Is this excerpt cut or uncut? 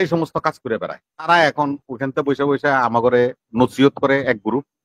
cut